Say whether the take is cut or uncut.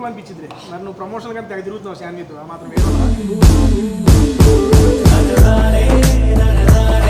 uncut